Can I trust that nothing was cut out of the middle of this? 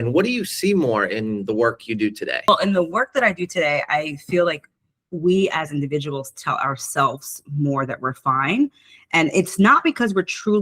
no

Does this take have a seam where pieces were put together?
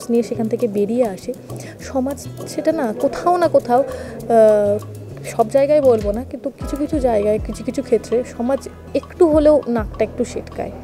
no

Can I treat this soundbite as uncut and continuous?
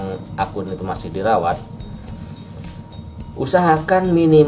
yes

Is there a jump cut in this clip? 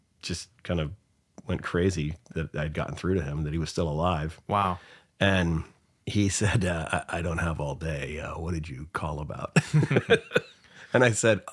no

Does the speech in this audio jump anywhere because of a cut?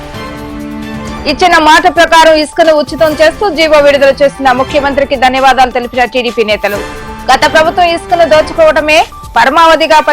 yes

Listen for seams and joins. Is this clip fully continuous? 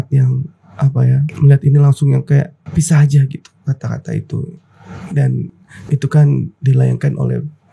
no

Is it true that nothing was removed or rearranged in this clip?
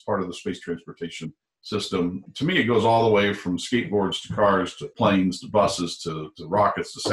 no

